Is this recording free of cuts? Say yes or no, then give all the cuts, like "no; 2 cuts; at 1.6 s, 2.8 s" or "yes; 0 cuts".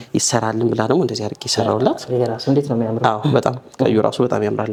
yes; 0 cuts